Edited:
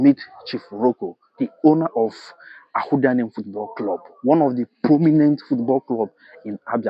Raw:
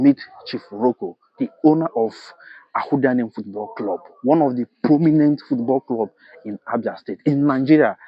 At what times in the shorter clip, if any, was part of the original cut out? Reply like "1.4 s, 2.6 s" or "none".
none